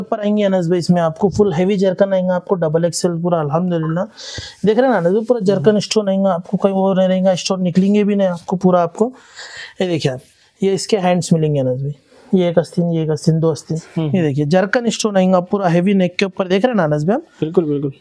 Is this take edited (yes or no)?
yes